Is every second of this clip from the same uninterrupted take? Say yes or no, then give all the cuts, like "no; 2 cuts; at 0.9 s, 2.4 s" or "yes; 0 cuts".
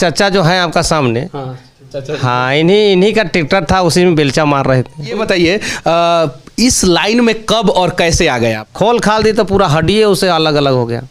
no; 2 cuts; at 5.2 s, 8.6 s